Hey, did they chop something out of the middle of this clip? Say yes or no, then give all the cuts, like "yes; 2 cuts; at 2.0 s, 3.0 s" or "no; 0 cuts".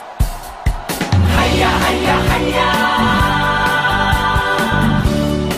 yes; 1 cut; at 4.5 s